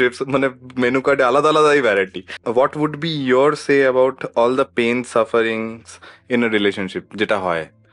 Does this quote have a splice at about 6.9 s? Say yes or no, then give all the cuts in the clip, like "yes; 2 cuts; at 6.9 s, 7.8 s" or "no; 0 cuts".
no; 1 cut; at 2.4 s